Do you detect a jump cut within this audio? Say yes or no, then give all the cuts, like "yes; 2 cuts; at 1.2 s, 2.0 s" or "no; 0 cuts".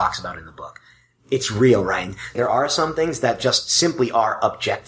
yes; 1 cut; at 2.3 s